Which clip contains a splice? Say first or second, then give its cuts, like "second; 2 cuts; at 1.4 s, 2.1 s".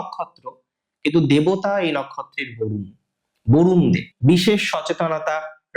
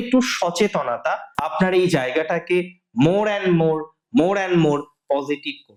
first; 1 cut; at 4.1 s